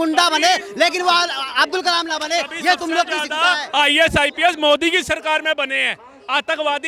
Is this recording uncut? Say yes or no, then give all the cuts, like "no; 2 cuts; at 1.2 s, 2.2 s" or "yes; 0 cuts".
yes; 0 cuts